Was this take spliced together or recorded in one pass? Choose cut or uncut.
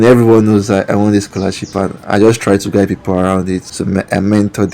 cut